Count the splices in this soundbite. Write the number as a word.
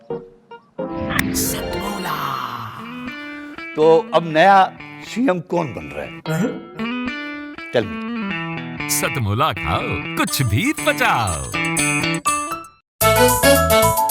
one